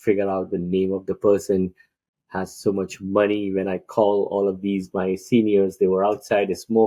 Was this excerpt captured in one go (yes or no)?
yes